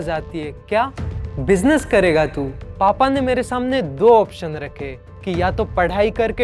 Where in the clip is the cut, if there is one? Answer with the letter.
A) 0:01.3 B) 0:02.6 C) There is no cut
B